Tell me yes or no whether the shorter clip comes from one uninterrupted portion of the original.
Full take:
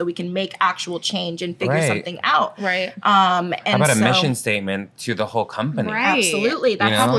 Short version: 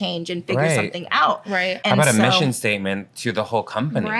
no